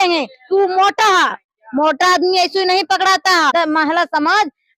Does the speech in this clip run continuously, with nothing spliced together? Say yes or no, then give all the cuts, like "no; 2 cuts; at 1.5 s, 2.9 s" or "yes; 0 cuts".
no; 1 cut; at 3.5 s